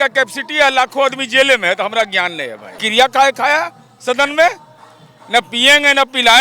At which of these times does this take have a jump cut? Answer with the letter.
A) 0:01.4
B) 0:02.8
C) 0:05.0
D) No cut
B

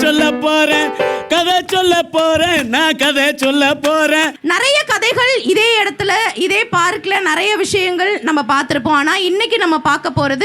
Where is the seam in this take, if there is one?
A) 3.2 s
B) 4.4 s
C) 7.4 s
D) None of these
B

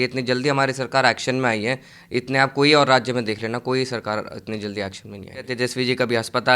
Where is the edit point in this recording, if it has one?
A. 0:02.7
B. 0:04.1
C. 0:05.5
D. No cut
C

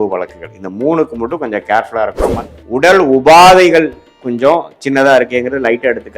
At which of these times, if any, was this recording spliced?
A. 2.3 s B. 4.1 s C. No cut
A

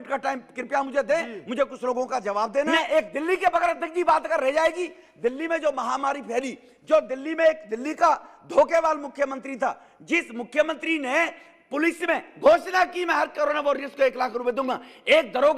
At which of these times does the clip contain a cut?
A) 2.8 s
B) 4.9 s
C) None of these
A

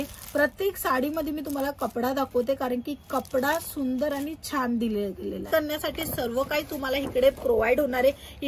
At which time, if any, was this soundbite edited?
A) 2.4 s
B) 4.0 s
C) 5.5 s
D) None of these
C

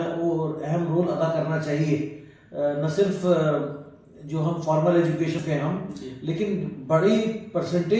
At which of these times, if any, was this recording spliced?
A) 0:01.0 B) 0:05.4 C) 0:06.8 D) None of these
B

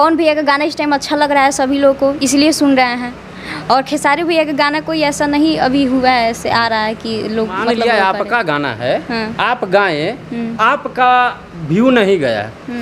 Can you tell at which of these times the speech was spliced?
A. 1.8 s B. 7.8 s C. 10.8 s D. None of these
B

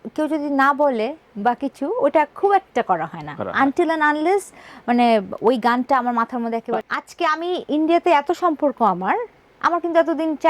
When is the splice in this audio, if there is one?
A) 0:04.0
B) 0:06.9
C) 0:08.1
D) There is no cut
B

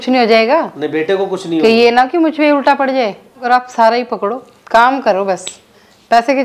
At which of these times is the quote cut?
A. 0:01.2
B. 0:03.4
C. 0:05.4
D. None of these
B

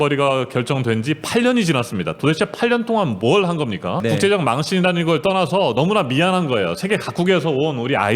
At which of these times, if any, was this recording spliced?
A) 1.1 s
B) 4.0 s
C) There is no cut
B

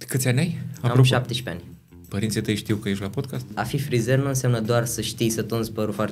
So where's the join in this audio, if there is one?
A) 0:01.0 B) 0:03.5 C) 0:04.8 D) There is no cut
B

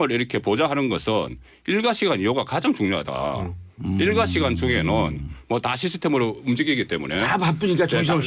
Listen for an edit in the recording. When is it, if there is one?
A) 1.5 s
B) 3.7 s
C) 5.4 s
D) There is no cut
B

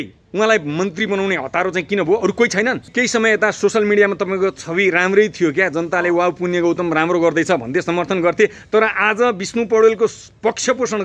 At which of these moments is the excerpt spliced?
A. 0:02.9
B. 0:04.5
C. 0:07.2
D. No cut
A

